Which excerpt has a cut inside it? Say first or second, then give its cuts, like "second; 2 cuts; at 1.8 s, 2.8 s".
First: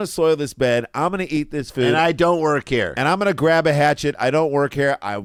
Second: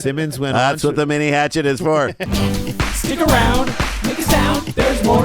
second; 1 cut; at 2.2 s